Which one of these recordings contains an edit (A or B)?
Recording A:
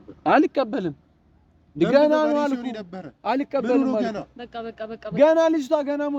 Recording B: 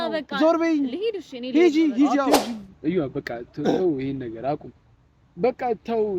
B